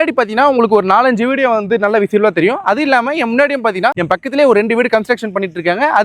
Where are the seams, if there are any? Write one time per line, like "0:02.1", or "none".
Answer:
none